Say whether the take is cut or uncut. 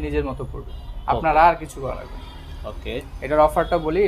uncut